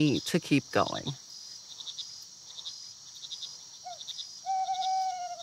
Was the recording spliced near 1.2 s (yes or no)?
yes